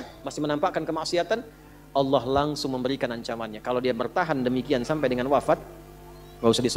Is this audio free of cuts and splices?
yes; 0 cuts

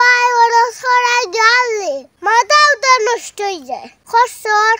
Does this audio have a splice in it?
no; 0 cuts

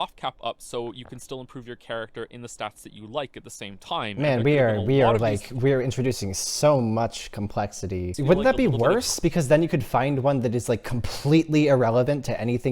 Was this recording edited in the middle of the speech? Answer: yes; 1 cut; at 8.1 s

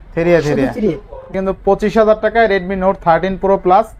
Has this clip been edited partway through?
yes; 1 cut; at 1.3 s

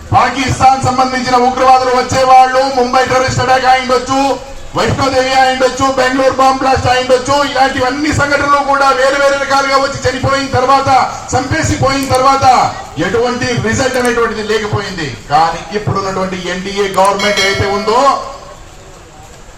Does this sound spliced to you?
no; 0 cuts

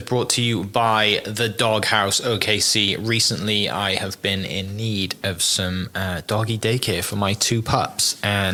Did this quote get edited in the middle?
no; 0 cuts

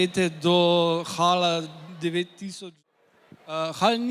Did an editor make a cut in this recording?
yes; 1 cut; at 2.5 s

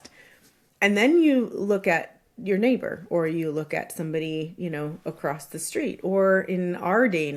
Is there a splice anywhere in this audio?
no; 0 cuts

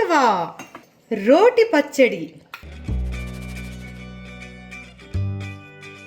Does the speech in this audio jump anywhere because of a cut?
no; 0 cuts

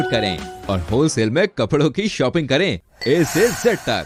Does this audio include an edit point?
no; 0 cuts

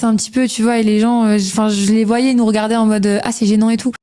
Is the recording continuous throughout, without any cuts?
yes; 0 cuts

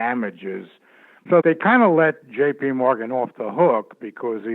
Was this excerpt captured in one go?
no; 1 cut; at 1.2 s

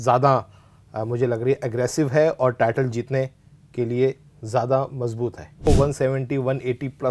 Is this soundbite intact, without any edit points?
no; 1 cut; at 5.7 s

